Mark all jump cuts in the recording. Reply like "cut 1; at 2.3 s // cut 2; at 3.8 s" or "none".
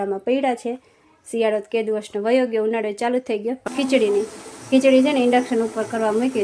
cut 1; at 3.6 s